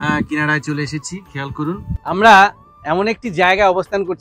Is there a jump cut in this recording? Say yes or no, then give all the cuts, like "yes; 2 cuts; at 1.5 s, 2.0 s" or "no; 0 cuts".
yes; 1 cut; at 1.9 s